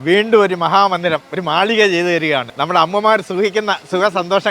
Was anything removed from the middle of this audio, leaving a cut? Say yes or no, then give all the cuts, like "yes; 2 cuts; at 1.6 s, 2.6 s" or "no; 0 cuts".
yes; 2 cuts; at 1.3 s, 2.5 s